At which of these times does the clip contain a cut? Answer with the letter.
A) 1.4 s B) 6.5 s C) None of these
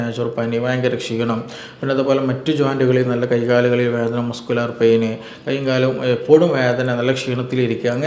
C